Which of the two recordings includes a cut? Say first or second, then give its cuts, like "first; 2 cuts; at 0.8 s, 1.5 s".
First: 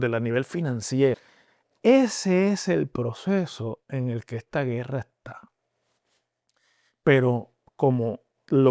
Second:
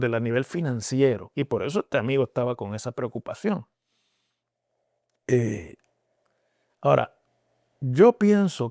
first; 1 cut; at 1.3 s